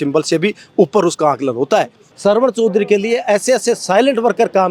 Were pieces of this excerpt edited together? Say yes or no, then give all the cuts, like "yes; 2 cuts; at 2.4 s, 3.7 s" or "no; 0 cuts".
yes; 1 cut; at 2.0 s